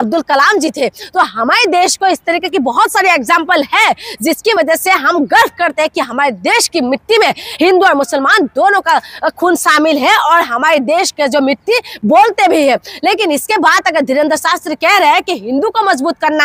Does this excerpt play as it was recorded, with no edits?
yes; 0 cuts

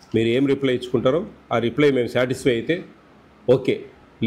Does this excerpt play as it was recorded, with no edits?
yes; 0 cuts

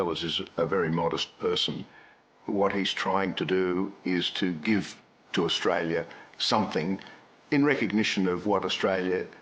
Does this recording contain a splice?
yes; 1 cut; at 2.2 s

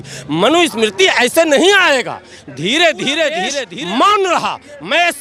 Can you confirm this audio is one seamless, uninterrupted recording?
no; 1 cut; at 3.6 s

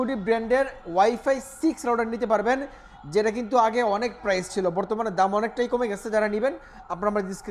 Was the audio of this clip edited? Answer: no; 0 cuts

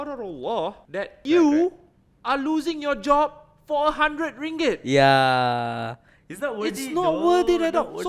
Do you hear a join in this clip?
yes; 1 cut; at 1.1 s

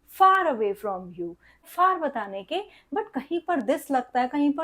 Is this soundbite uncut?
no; 1 cut; at 1.7 s

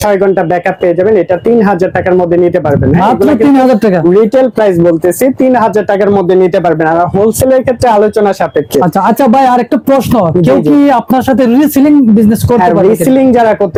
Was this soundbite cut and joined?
no; 0 cuts

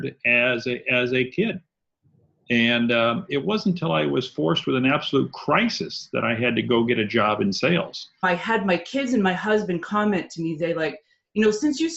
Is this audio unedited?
no; 1 cut; at 8.2 s

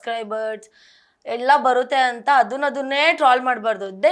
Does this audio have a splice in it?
no; 0 cuts

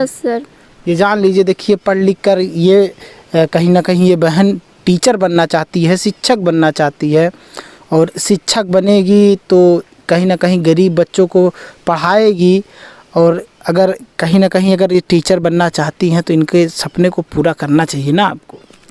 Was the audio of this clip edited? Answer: no; 0 cuts

